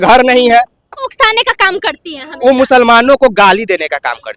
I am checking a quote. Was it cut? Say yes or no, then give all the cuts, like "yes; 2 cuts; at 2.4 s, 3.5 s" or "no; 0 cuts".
yes; 1 cut; at 1.1 s